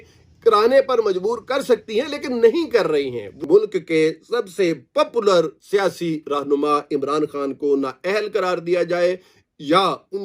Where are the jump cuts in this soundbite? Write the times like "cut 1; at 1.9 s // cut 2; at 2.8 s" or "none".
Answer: cut 1; at 3.2 s